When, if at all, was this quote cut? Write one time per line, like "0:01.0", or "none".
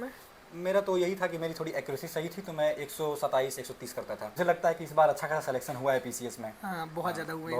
0:04.3